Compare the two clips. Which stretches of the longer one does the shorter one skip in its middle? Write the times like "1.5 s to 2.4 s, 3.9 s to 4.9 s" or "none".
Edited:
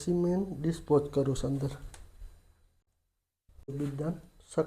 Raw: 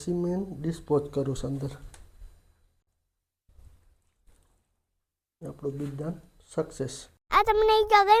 3.7 s to 5.7 s